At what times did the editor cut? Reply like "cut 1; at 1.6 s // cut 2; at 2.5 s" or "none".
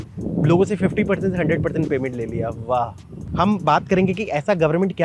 cut 1; at 3.2 s